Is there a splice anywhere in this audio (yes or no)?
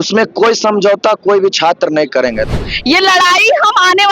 yes